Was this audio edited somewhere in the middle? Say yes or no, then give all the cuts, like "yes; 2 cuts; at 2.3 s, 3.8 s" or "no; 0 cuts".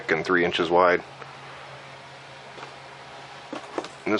yes; 1 cut; at 2.5 s